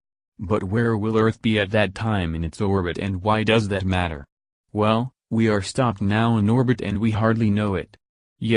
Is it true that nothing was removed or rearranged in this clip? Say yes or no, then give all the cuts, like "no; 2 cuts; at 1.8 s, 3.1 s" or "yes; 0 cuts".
yes; 0 cuts